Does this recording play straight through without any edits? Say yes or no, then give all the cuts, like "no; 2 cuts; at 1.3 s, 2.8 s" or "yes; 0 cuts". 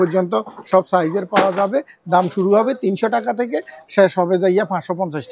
yes; 0 cuts